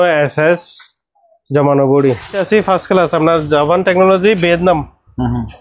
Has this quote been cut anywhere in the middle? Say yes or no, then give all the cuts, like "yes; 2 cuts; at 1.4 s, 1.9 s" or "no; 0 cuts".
yes; 1 cut; at 2.4 s